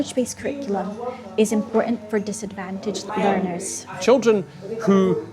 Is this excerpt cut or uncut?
cut